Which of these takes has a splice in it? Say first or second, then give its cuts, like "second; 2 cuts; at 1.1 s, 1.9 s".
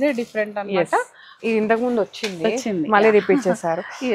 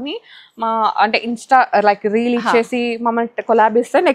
first; 1 cut; at 1.2 s